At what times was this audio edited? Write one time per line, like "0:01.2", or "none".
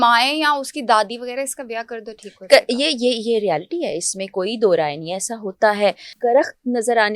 0:06.1